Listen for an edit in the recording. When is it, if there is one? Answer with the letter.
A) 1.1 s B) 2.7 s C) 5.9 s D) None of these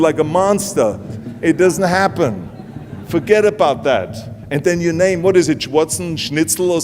A